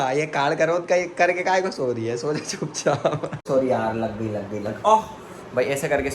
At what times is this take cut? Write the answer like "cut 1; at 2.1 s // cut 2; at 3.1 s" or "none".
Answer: cut 1; at 3.3 s

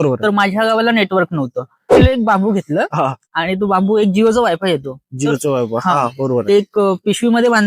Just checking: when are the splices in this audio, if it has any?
cut 1; at 2.0 s

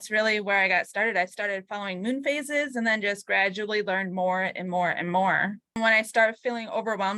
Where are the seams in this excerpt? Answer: cut 1; at 5.8 s

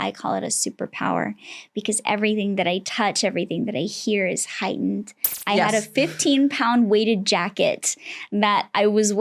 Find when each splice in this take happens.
cut 1; at 5.3 s

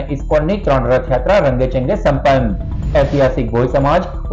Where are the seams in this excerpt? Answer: none

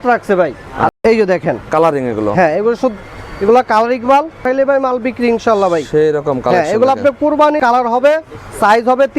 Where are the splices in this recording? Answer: cut 1; at 0.9 s // cut 2; at 4.4 s // cut 3; at 7.6 s

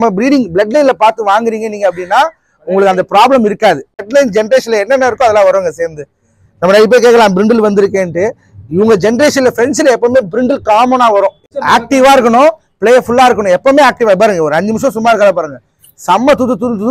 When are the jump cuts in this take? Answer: cut 1; at 4.1 s // cut 2; at 11.5 s

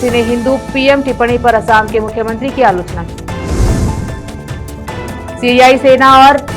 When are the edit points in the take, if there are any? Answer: none

